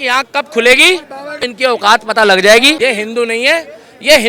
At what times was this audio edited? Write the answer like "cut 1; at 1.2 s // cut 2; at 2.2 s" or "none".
cut 1; at 1.5 s // cut 2; at 2.9 s